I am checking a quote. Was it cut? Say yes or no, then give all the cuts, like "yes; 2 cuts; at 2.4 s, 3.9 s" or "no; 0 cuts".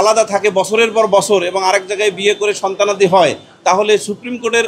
no; 0 cuts